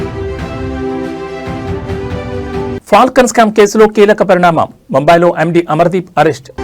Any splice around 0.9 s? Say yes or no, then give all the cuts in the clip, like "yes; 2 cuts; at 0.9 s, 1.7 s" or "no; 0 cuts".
no; 1 cut; at 2.4 s